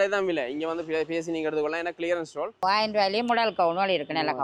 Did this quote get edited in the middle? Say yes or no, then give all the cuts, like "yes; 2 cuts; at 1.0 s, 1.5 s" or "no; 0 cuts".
yes; 1 cut; at 2.6 s